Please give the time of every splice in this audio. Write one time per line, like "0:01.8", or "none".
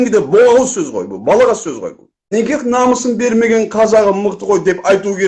0:02.1

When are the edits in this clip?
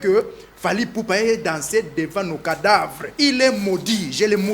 0:03.0

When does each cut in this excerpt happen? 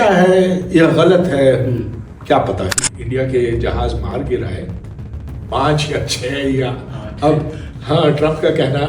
0:02.9

